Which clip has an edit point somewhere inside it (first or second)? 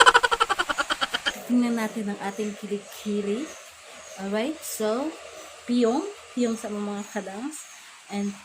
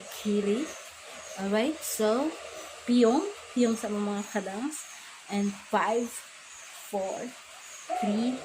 first